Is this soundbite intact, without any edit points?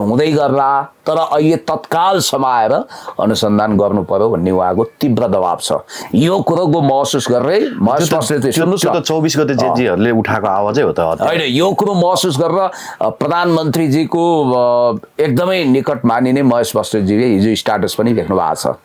yes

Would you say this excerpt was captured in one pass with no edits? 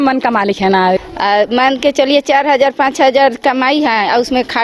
no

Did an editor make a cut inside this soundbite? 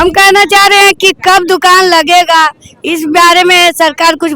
no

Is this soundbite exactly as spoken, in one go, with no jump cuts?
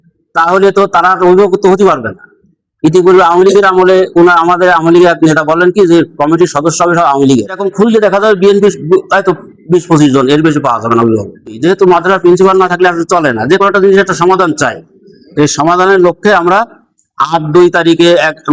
no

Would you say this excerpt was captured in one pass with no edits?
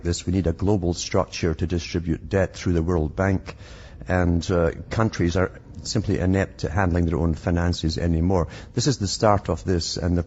yes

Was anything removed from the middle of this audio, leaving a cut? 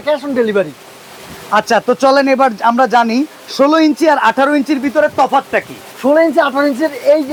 no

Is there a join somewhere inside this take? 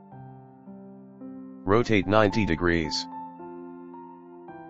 no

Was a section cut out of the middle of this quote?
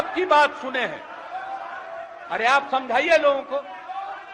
no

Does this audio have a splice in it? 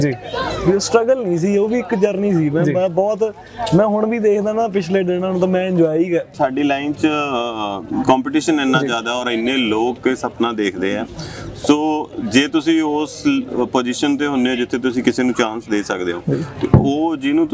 yes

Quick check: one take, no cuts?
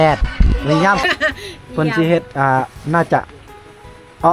no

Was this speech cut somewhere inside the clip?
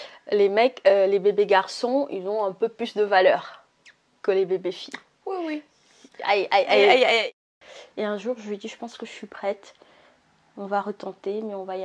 yes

